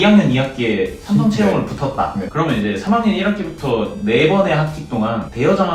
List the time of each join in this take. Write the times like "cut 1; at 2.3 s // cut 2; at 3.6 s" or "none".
none